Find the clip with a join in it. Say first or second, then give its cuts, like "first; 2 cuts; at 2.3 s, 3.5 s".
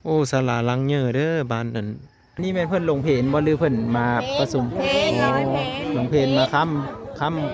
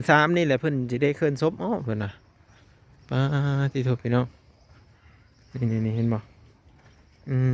first; 1 cut; at 2.3 s